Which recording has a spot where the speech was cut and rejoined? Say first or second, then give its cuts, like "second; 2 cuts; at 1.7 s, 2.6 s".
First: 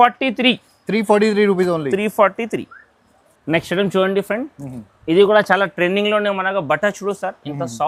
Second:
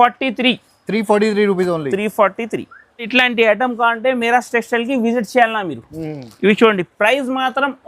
second; 1 cut; at 3.1 s